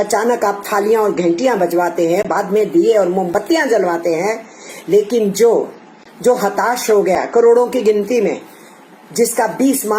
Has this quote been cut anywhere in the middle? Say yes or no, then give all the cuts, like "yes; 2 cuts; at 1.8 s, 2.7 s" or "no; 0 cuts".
no; 0 cuts